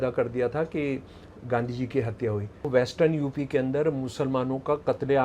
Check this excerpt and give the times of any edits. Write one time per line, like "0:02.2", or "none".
0:02.7

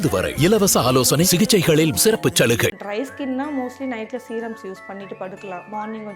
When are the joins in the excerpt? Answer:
0:02.9

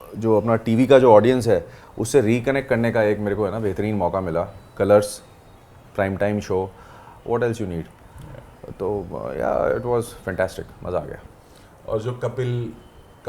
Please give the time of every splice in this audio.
none

